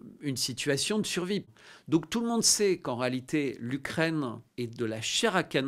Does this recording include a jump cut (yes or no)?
yes